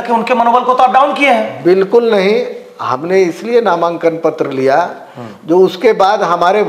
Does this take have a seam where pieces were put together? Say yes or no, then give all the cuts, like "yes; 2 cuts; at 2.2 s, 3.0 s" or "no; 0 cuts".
no; 0 cuts